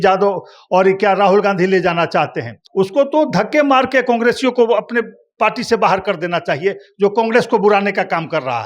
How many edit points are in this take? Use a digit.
1